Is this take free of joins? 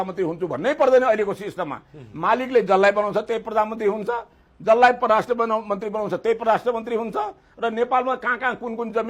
yes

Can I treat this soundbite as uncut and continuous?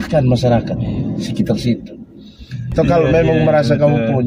no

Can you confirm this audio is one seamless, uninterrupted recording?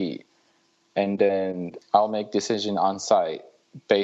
no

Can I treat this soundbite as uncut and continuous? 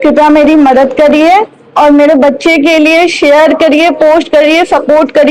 yes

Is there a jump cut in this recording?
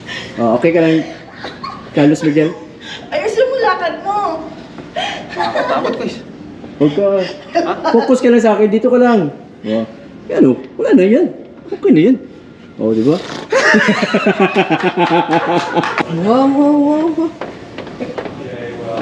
yes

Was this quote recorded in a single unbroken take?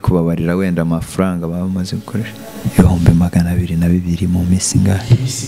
no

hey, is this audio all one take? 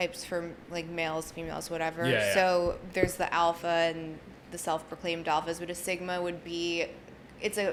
yes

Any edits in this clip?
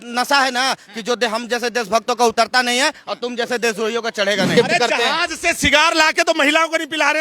yes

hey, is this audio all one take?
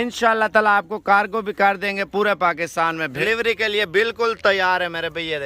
no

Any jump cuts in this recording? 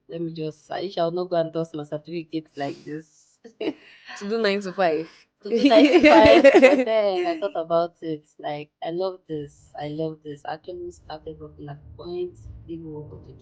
no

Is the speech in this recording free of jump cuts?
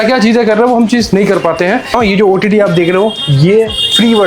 no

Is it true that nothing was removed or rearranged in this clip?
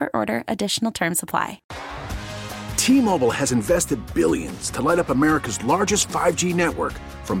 no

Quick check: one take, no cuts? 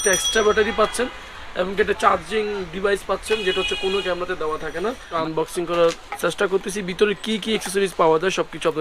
no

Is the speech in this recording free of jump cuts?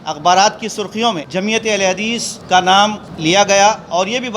no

